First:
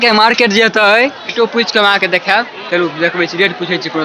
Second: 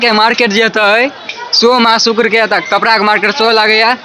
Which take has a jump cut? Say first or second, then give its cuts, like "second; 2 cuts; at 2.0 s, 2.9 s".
first; 1 cut; at 1.3 s